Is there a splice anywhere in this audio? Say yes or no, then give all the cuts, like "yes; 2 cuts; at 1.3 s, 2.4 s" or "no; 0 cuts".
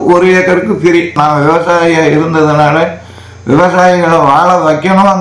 yes; 1 cut; at 0.9 s